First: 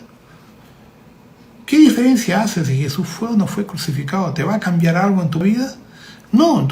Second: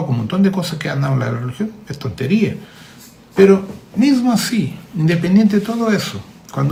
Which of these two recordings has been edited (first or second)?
first